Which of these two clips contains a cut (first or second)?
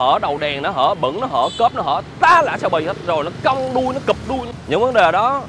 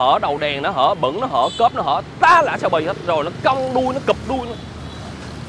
first